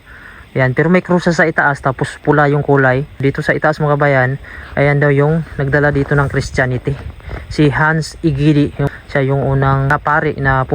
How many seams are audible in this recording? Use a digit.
3